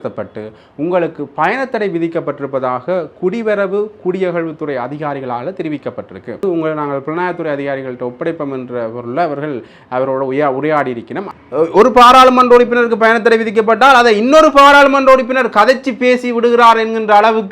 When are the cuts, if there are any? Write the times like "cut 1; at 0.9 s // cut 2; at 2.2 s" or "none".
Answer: cut 1; at 6.4 s // cut 2; at 11.3 s